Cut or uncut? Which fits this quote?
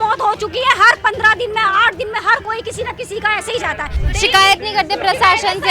cut